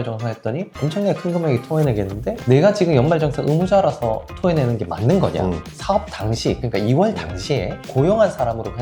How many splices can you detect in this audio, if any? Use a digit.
2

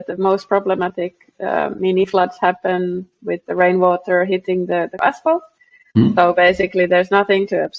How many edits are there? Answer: 1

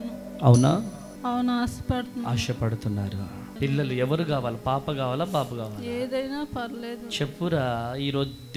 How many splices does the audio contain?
2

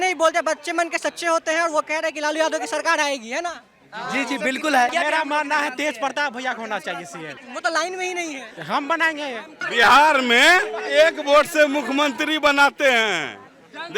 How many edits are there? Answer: 4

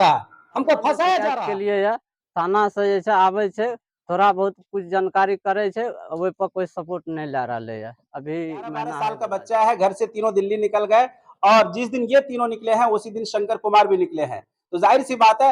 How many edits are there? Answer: 2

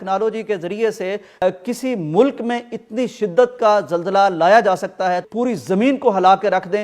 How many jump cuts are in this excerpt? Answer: 2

